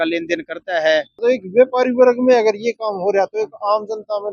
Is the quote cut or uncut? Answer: cut